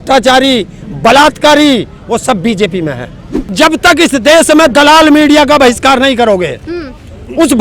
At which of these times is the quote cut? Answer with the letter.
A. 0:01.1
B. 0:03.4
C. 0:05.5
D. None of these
B